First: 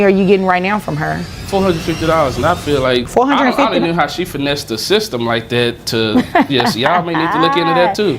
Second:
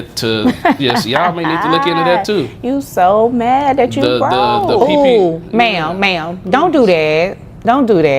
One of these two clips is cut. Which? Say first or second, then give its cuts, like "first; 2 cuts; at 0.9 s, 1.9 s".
first; 2 cuts; at 1.3 s, 3.1 s